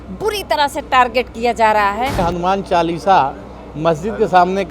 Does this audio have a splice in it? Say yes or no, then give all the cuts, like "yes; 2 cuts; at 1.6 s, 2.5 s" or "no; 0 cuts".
yes; 1 cut; at 2.2 s